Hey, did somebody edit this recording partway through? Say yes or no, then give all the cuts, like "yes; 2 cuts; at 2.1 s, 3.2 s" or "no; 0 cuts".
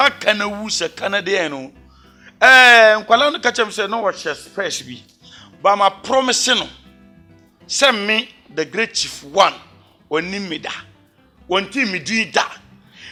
no; 0 cuts